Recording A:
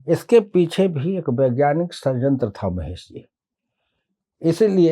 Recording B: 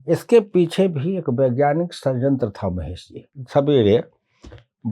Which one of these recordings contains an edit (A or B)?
B